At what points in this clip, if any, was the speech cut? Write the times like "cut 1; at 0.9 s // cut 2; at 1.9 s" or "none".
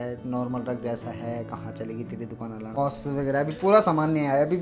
cut 1; at 2.8 s